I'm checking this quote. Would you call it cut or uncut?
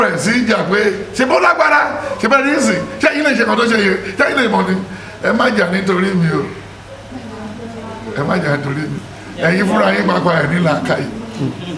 uncut